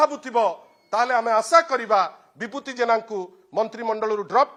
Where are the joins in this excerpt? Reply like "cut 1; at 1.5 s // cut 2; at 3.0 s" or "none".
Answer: none

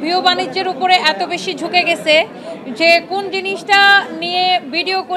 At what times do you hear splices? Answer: none

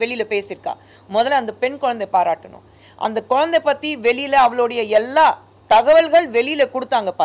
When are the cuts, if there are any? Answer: none

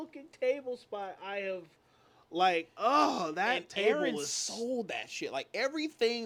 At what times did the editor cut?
none

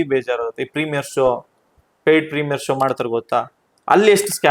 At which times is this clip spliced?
none

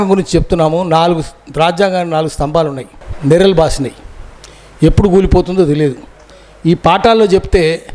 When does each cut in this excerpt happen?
cut 1; at 2.9 s

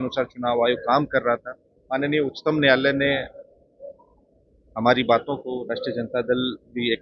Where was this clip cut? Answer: cut 1; at 1.7 s

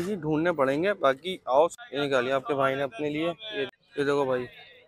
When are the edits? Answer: cut 1; at 1.8 s // cut 2; at 3.7 s

